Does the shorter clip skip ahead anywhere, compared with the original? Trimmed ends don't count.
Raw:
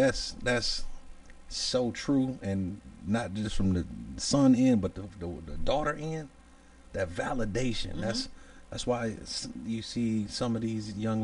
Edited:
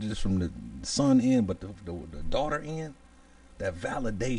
no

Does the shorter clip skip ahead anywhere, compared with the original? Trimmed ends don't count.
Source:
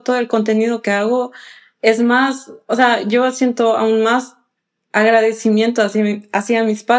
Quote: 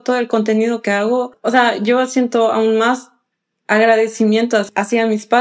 yes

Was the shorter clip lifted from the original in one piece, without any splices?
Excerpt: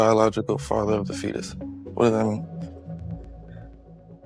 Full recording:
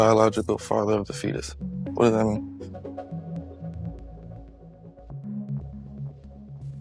no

